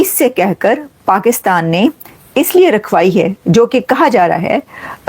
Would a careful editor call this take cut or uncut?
uncut